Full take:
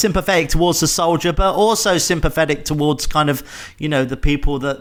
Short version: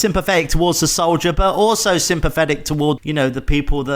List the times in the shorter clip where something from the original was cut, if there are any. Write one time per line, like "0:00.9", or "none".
0:03.0